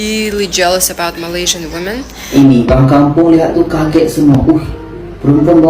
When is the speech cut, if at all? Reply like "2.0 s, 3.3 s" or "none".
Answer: 2.3 s